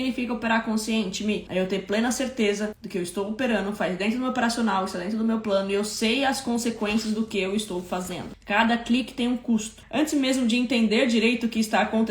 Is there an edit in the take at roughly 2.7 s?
no; 1 cut; at 9.8 s

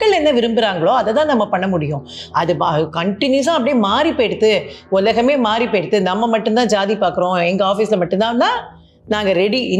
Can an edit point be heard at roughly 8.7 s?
no; 0 cuts

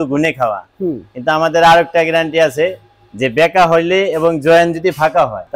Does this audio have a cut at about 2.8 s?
no; 0 cuts

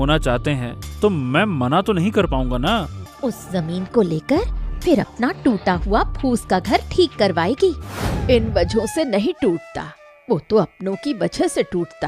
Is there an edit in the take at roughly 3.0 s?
yes; 2 cuts; at 3.0 s, 8.1 s

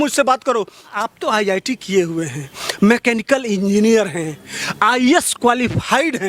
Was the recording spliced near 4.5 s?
no; 1 cut; at 1.0 s

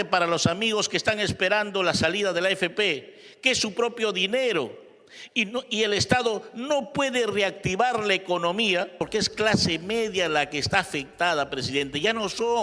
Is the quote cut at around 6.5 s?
no; 1 cut; at 9.0 s

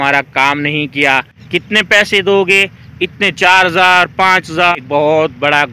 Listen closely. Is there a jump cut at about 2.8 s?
no; 2 cuts; at 1.3 s, 4.7 s

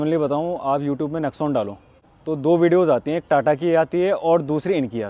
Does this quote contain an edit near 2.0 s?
yes; 1 cut; at 2.0 s

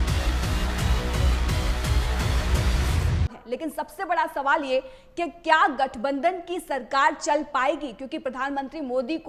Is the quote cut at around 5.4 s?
no; 1 cut; at 3.4 s

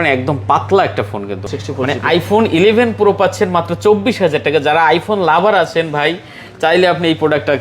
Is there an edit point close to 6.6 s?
no; 1 cut; at 1.5 s

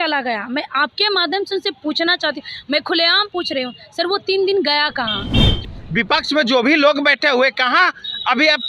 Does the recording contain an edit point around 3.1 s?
no; 1 cut; at 5.5 s

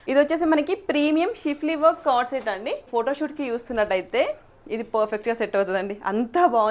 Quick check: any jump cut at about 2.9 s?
yes; 1 cut; at 2.9 s

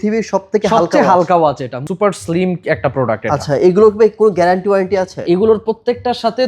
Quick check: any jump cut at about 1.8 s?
yes; 1 cut; at 1.8 s

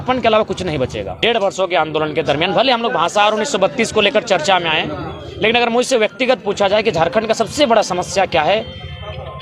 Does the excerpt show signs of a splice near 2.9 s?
no; 1 cut; at 1.1 s

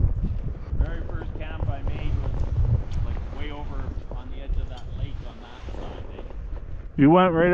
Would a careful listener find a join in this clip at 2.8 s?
no; 0 cuts

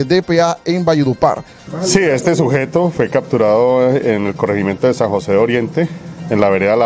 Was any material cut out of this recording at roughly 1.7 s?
yes; 1 cut; at 1.7 s

